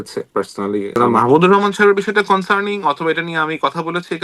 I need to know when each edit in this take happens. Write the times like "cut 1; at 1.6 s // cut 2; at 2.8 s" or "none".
cut 1; at 0.9 s